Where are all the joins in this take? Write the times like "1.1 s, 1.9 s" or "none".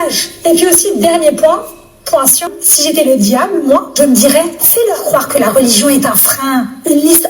2.6 s